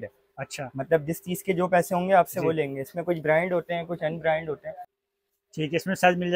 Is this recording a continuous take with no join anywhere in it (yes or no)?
no